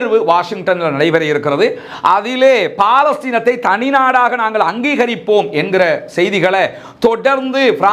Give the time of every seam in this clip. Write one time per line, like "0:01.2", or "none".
none